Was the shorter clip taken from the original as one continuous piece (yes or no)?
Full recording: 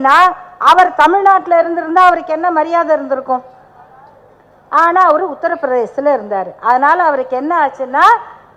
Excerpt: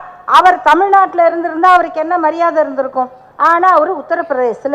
no